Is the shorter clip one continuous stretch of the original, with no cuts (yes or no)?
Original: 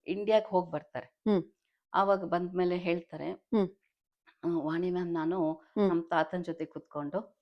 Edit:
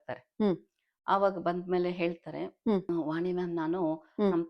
no